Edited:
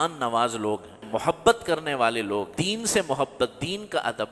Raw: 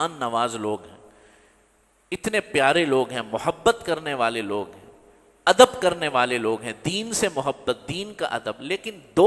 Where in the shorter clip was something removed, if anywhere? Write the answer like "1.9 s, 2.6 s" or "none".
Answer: 1.0 s, 2.6 s

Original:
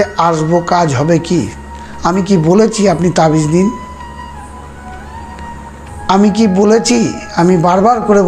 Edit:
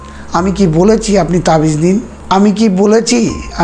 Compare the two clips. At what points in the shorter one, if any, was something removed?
2.1 s

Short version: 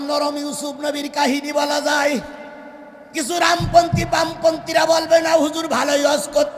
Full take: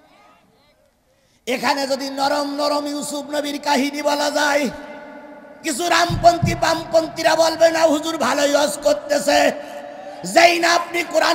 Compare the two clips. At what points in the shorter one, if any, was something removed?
none

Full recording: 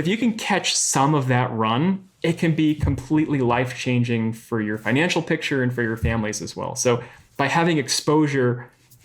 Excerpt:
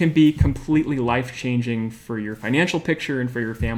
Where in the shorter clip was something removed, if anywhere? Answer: none

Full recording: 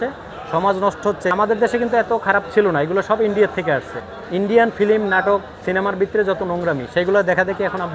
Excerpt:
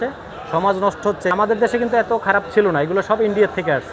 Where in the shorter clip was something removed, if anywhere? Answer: none

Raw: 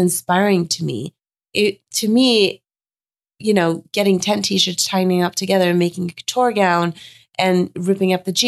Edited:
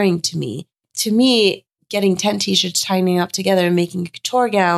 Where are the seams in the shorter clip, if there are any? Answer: 0.9 s, 1.8 s

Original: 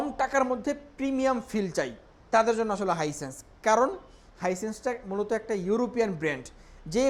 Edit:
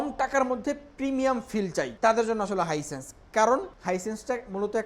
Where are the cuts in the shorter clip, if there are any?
1.9 s, 3.7 s

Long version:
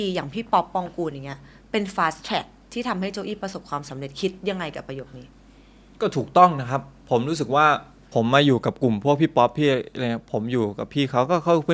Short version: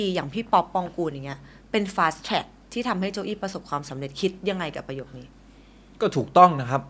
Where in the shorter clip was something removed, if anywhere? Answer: none

